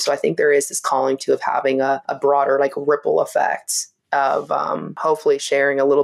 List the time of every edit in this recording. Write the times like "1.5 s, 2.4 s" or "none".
2.1 s, 4.9 s